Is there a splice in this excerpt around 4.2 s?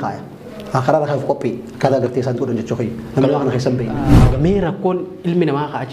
yes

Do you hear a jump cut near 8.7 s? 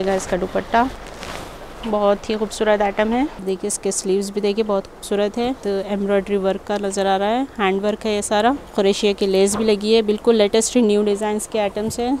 yes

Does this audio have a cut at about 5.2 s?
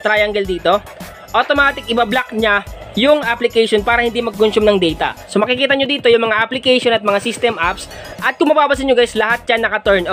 yes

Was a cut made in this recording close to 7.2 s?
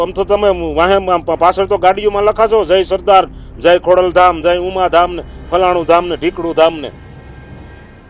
yes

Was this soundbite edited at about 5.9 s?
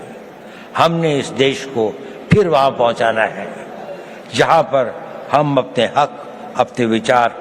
yes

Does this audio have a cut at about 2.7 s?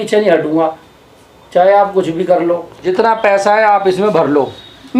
yes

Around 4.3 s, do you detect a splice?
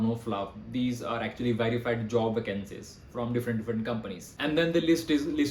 yes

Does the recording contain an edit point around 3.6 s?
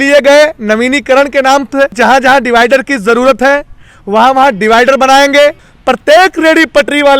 no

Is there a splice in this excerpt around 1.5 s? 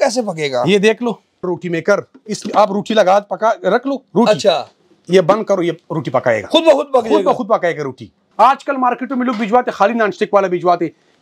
yes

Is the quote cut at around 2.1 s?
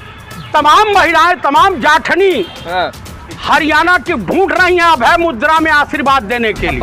no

